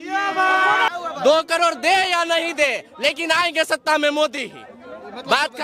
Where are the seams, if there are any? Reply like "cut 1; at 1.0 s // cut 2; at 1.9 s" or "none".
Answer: cut 1; at 0.9 s

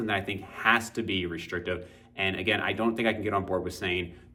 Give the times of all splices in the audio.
none

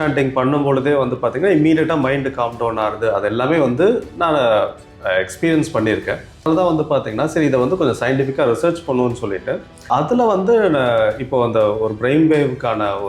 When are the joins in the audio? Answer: cut 1; at 6.4 s // cut 2; at 9.9 s

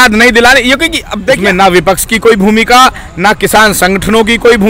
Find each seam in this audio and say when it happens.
cut 1; at 1.4 s

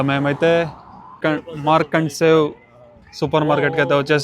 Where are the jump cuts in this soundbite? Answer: cut 1; at 1.2 s

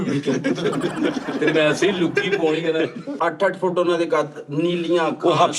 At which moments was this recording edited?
cut 1; at 3.1 s

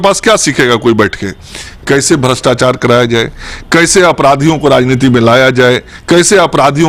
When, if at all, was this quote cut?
none

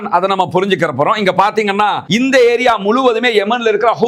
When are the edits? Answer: cut 1; at 2.0 s

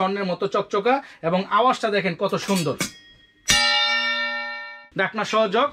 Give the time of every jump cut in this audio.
cut 1; at 4.8 s

